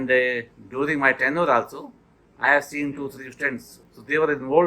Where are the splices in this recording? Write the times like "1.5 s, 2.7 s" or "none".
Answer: 3.8 s